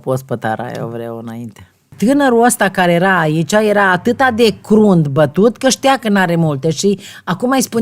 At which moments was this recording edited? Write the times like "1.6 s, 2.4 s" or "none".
1.9 s